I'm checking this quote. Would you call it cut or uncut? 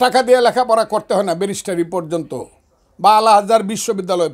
uncut